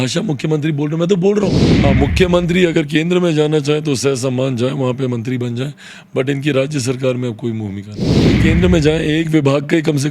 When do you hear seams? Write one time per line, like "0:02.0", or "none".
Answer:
0:01.7
0:08.4